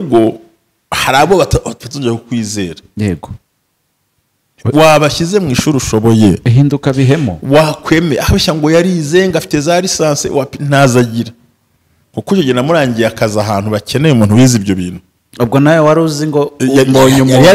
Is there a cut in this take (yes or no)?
no